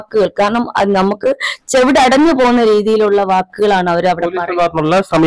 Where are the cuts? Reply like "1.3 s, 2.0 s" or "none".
none

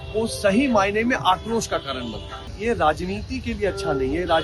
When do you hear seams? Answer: 2.5 s

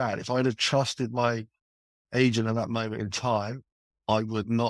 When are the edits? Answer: none

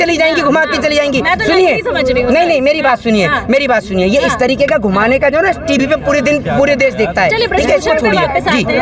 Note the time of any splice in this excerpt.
none

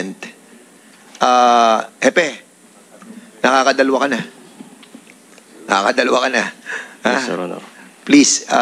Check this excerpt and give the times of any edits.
none

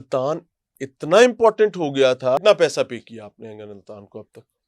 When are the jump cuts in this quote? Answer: 2.4 s

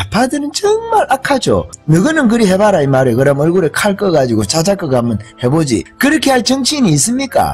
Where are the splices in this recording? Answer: 1.7 s, 5.9 s

